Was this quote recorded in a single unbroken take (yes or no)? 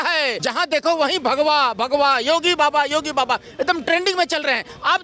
yes